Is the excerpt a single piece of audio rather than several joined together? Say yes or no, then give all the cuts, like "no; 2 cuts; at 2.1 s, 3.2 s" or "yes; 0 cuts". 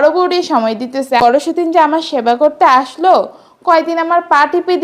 no; 1 cut; at 1.2 s